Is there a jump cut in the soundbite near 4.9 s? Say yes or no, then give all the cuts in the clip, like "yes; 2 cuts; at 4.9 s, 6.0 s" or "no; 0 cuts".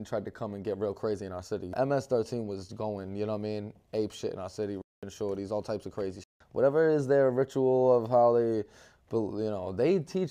no; 2 cuts; at 1.7 s, 6.4 s